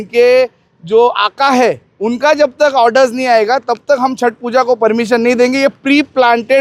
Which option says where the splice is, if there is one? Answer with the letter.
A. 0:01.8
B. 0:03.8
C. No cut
C